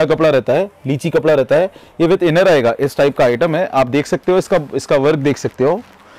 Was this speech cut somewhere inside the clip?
no; 0 cuts

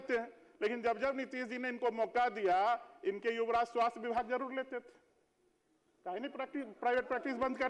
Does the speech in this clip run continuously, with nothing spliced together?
yes; 0 cuts

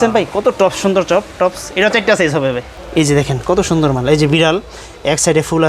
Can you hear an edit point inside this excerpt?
yes; 1 cut; at 2.8 s

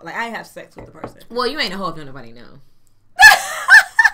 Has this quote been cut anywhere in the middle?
no; 0 cuts

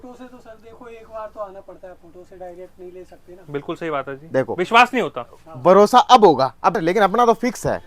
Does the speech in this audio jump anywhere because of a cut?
yes; 1 cut; at 6.8 s

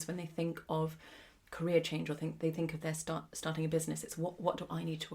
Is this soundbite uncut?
yes; 0 cuts

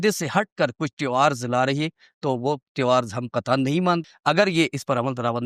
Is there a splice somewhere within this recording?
yes; 1 cut; at 4.0 s

